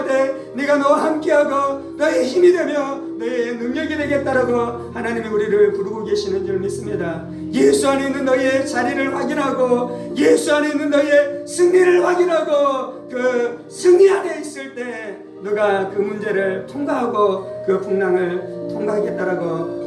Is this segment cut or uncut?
uncut